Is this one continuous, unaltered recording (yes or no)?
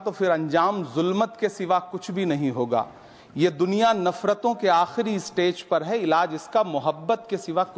yes